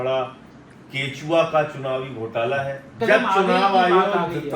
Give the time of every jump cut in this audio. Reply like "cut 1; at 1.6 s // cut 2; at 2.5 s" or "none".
cut 1; at 2.9 s